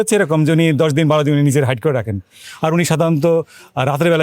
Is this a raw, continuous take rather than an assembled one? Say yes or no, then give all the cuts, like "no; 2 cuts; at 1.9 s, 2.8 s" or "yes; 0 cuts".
no; 1 cut; at 2.5 s